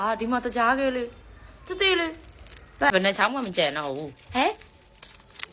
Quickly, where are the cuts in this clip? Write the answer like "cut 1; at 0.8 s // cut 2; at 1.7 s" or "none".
cut 1; at 2.9 s